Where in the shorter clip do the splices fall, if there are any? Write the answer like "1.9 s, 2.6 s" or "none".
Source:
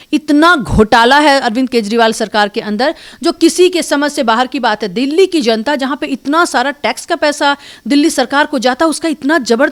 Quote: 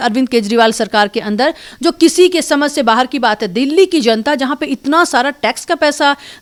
none